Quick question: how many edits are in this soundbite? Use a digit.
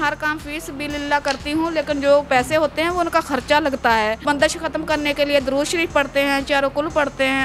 2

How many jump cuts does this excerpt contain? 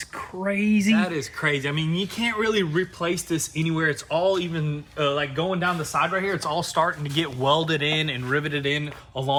0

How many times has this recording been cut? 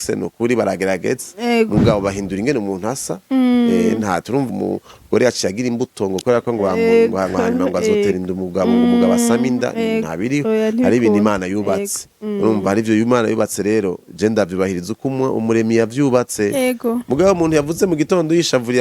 1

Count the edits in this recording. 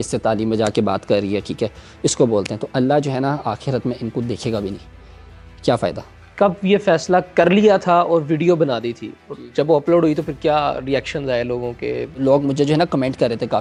0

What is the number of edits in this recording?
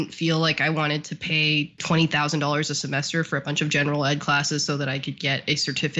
1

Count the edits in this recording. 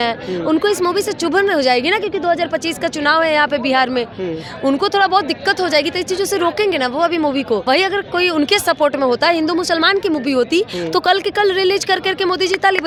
0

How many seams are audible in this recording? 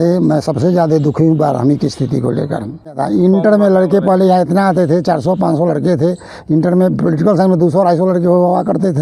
1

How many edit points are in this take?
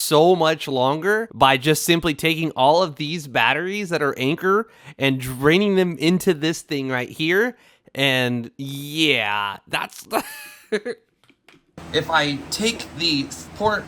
2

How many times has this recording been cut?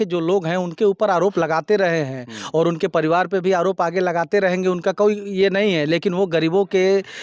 0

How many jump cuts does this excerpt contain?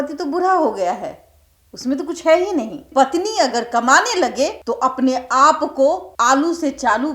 3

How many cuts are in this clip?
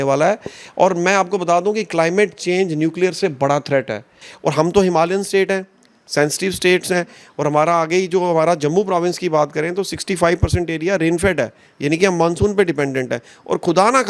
1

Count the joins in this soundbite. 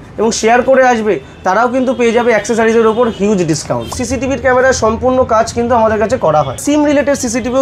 2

